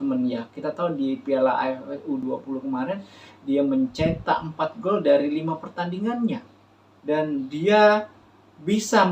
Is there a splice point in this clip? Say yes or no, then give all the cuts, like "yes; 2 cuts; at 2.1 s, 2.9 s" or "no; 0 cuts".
no; 0 cuts